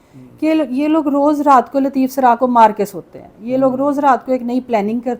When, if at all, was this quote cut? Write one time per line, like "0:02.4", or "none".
none